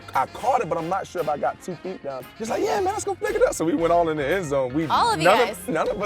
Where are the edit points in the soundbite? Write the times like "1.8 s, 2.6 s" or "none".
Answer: 2.3 s